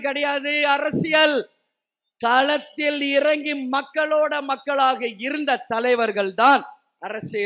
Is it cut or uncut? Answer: uncut